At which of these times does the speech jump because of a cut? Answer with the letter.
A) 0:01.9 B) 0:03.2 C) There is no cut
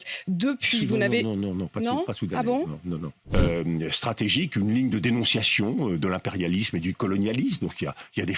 B